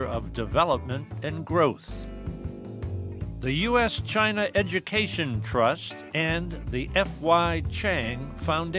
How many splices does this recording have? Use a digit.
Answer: 2